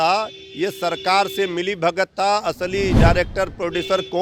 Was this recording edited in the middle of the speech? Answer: no; 0 cuts

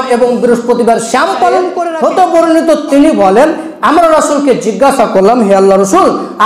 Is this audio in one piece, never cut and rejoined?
no; 1 cut; at 1.8 s

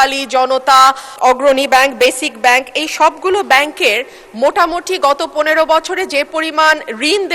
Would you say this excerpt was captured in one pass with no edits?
no; 1 cut; at 1.1 s

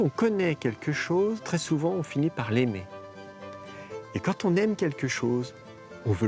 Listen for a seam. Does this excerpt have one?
yes; 1 cut; at 1.4 s

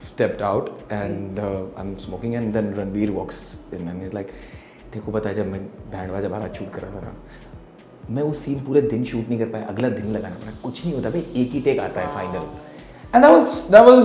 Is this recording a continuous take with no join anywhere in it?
yes; 0 cuts

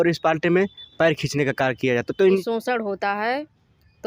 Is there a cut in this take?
yes; 1 cut; at 2.4 s

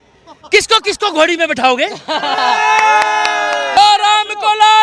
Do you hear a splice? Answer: yes; 1 cut; at 3.8 s

